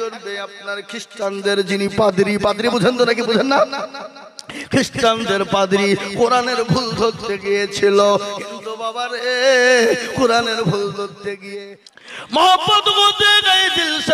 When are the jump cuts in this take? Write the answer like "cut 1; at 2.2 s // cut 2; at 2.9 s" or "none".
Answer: cut 1; at 11.5 s